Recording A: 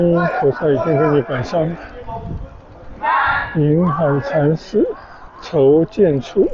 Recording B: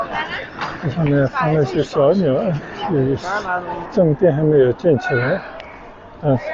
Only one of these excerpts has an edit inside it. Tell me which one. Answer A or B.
B